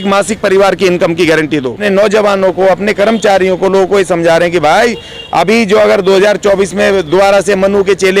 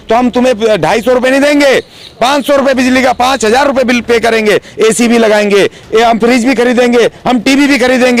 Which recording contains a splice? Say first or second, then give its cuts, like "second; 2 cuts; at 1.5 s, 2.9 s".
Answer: first; 1 cut; at 1.8 s